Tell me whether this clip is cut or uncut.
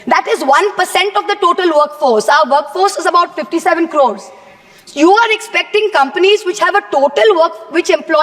uncut